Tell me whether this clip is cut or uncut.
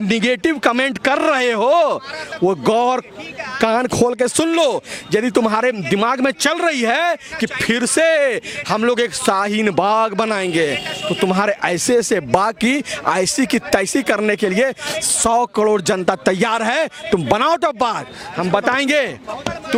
uncut